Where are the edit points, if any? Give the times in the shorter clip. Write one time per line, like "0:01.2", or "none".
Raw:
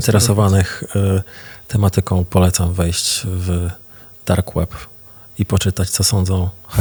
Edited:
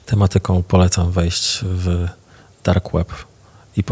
none